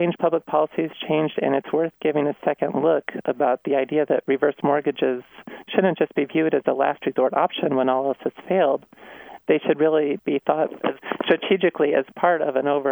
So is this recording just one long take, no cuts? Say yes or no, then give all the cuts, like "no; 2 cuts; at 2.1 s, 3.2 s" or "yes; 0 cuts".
yes; 0 cuts